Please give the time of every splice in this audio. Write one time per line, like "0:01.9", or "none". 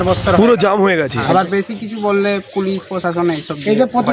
0:01.2